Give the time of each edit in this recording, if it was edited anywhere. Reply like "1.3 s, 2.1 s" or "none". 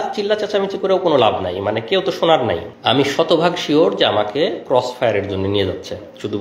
2.7 s